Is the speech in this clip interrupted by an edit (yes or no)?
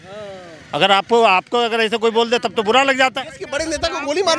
no